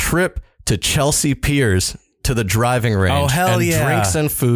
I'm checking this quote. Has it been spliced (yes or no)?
no